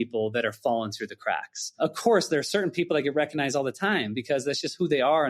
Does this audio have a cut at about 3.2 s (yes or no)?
no